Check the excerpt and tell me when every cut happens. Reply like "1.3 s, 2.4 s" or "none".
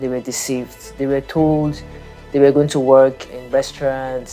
3.2 s

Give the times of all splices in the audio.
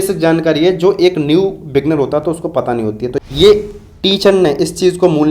3.2 s

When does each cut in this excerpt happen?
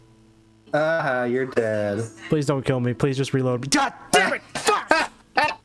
none

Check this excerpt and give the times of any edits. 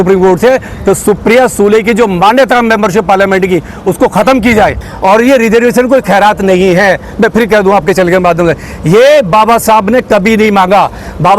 4.9 s

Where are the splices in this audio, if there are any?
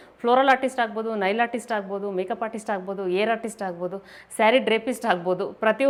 none

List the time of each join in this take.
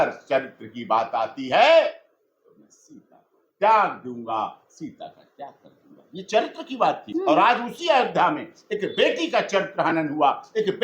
7.0 s

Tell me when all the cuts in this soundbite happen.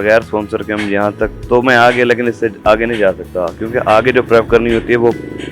none

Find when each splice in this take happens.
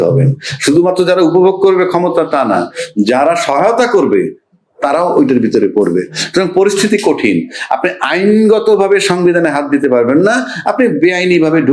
none

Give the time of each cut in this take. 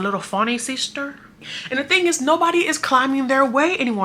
1.4 s

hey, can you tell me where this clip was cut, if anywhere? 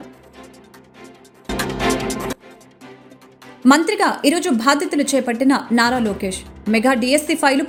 none

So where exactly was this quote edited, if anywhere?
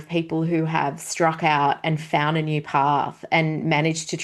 none

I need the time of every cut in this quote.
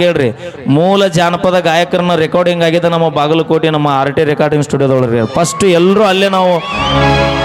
none

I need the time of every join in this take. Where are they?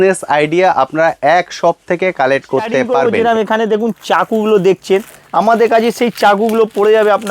2.9 s

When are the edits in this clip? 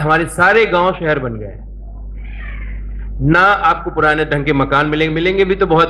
none

